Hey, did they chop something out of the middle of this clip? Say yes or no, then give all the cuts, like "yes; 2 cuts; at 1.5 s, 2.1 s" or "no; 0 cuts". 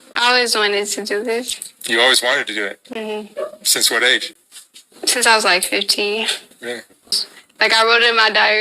yes; 1 cut; at 7.3 s